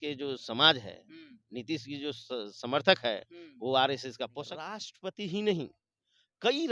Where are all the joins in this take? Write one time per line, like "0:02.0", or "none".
0:04.8